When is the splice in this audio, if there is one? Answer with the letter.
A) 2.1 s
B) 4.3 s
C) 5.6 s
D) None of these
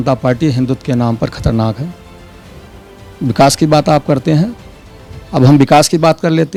D